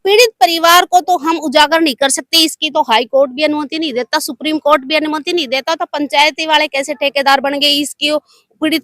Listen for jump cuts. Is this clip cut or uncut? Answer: uncut